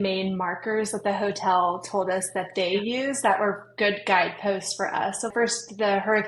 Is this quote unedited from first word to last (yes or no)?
no